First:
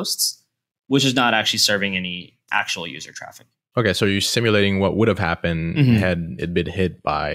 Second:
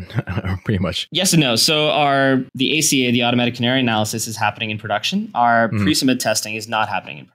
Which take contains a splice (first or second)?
second